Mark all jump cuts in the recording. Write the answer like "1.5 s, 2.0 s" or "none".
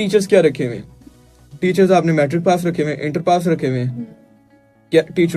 none